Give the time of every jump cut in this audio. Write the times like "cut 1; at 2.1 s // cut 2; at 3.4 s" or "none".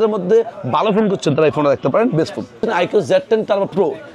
cut 1; at 2.6 s